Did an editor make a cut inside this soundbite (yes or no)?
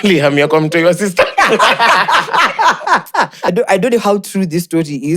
yes